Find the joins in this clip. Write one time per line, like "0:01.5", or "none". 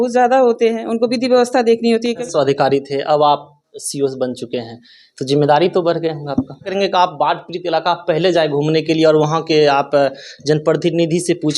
0:02.2
0:06.7